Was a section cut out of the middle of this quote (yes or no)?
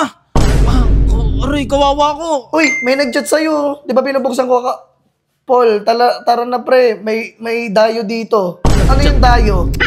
no